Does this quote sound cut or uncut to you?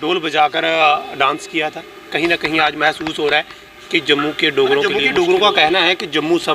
cut